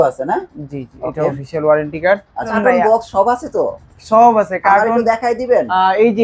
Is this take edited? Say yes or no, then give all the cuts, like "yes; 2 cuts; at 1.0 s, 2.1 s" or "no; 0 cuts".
yes; 1 cut; at 2.5 s